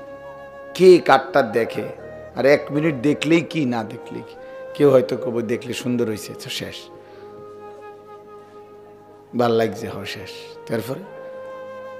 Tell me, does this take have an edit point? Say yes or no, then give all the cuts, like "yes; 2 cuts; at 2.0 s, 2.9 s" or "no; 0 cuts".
yes; 1 cut; at 11.1 s